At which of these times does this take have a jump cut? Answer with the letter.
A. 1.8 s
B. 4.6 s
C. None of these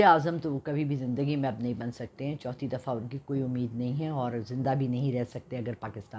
C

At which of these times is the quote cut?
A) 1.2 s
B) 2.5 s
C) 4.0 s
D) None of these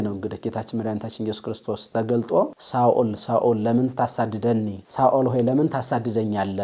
D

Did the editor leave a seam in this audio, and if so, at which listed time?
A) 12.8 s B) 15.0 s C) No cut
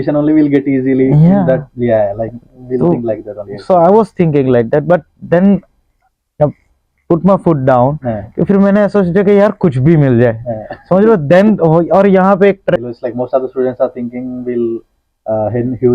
A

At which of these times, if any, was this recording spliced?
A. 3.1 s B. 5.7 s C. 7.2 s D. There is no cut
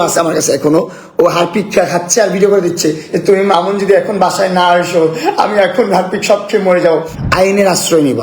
C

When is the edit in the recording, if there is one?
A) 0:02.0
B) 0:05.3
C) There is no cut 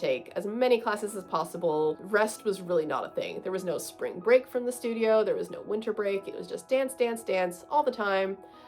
A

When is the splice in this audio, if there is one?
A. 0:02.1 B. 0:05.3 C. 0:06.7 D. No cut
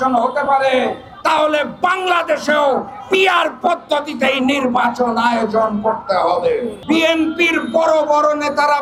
C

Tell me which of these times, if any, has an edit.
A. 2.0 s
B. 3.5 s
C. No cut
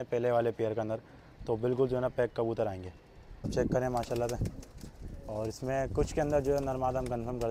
B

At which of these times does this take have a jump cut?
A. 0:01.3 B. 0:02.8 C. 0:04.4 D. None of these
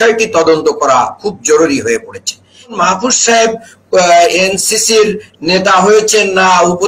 B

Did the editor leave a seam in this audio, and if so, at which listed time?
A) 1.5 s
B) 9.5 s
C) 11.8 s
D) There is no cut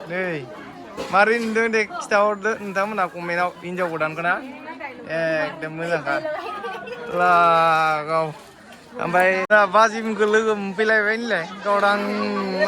B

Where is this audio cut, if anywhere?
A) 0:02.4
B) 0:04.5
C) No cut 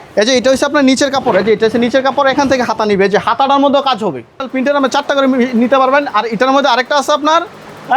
B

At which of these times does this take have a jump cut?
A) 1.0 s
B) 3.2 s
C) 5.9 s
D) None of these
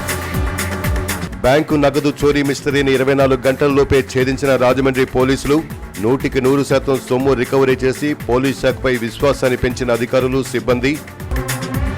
A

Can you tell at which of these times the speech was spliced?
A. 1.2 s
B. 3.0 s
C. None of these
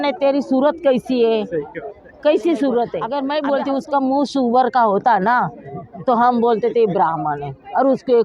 B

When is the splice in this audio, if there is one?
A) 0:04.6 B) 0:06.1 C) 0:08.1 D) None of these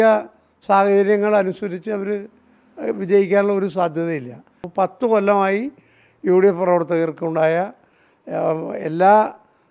A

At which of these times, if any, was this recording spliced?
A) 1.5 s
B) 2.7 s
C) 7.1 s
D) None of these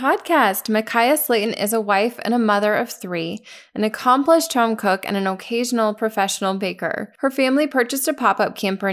C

